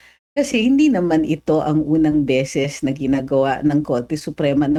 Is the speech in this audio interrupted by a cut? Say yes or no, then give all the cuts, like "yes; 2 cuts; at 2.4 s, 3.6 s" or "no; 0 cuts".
no; 0 cuts